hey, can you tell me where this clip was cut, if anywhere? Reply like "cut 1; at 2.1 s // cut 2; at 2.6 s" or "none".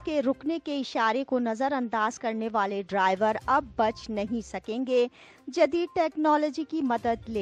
none

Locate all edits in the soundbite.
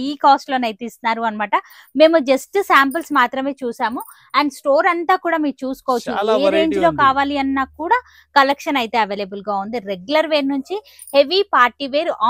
none

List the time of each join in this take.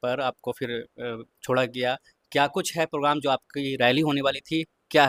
none

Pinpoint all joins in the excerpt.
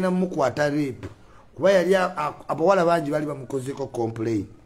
none

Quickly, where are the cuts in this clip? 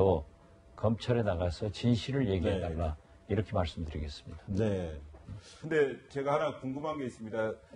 cut 1; at 6.0 s

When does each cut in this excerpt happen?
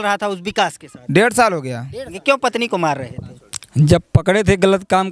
cut 1; at 2.1 s

